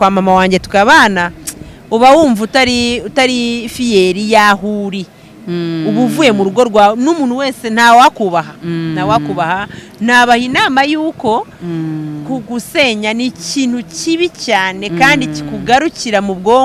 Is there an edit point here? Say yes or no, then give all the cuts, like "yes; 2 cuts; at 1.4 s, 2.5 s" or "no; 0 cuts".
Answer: no; 0 cuts